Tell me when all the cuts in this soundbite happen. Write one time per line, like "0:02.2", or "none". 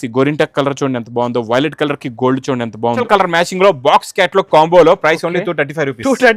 0:03.0